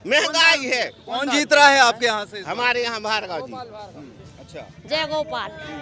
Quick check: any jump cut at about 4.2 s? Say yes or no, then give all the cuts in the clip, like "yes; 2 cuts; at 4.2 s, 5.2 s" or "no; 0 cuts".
yes; 1 cut; at 4.2 s